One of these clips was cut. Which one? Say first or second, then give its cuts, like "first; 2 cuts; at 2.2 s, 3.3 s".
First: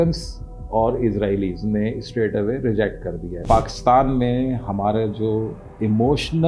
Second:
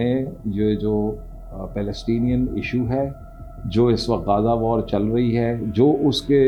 first; 1 cut; at 3.4 s